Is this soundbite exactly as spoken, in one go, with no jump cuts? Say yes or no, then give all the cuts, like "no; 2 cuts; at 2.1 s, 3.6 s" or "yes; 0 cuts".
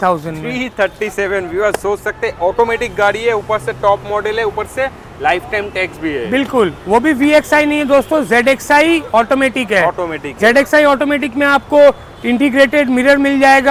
yes; 0 cuts